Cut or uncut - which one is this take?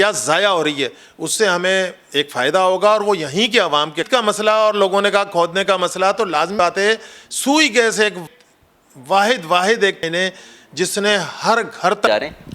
cut